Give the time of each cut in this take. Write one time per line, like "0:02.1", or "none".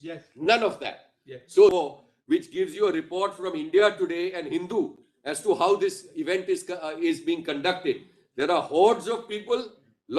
0:01.7